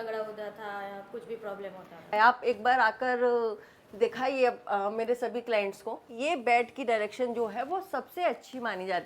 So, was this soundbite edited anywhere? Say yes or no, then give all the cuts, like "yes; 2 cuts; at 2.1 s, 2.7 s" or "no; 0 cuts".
yes; 2 cuts; at 2.1 s, 6.1 s